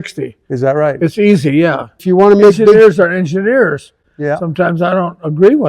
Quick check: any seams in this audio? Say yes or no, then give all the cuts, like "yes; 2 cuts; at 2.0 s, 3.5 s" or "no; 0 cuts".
yes; 1 cut; at 2.0 s